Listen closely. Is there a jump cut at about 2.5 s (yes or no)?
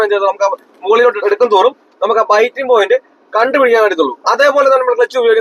no